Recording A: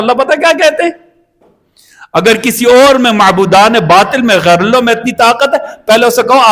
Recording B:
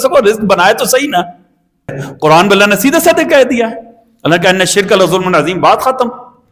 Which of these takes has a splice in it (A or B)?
B